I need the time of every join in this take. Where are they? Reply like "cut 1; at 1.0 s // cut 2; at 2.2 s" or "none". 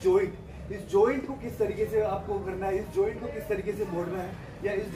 none